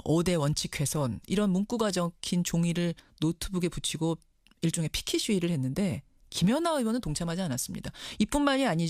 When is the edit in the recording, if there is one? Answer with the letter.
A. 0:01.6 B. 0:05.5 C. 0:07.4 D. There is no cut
C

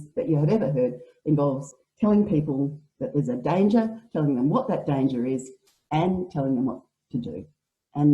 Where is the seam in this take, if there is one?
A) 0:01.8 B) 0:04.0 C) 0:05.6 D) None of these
A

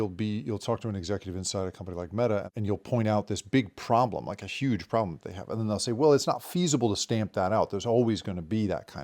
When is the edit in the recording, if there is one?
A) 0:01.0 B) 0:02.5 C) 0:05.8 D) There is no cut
B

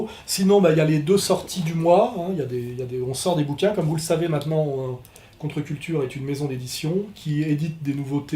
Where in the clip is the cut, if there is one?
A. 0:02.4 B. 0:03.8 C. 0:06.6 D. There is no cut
C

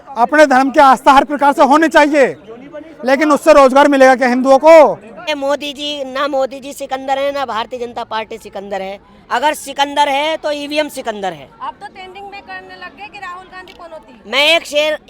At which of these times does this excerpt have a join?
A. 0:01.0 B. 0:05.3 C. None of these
B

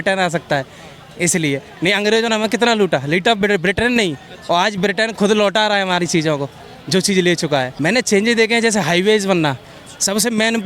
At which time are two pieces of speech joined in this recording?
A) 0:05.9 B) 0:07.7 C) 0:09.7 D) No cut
B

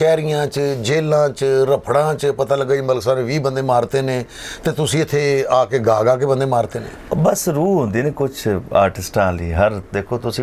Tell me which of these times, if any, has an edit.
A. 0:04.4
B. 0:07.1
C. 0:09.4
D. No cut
D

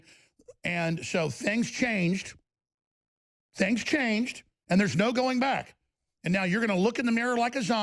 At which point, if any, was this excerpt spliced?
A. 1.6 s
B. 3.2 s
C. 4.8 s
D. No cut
D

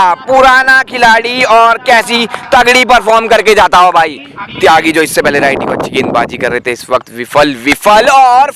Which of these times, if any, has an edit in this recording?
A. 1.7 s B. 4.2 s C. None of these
B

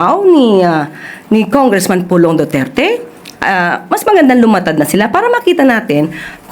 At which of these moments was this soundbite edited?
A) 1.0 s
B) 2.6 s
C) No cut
C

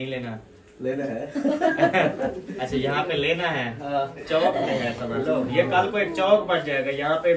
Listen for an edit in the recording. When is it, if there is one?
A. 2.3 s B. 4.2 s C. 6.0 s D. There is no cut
B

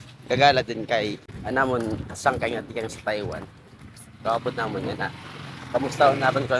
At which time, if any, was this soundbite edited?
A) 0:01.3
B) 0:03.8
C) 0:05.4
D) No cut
A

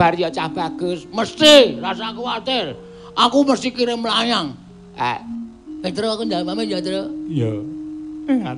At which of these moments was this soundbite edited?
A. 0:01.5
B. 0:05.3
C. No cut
B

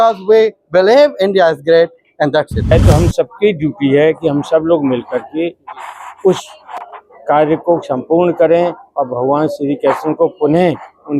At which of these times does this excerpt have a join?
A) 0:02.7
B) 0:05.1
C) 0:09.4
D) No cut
A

